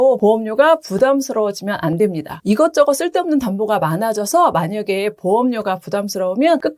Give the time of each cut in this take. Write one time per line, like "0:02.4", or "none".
0:02.4